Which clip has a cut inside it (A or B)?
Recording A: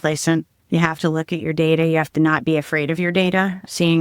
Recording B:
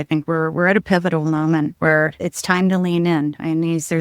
B